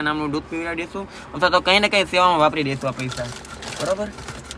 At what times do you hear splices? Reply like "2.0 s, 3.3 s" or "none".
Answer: none